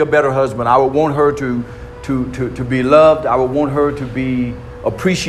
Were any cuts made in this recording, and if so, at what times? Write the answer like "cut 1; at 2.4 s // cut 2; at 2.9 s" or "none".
none